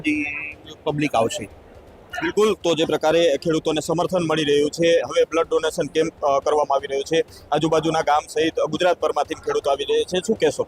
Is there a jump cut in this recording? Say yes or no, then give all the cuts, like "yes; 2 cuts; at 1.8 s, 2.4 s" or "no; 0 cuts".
no; 0 cuts